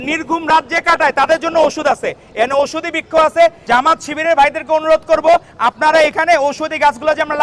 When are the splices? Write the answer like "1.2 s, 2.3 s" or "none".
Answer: 3.6 s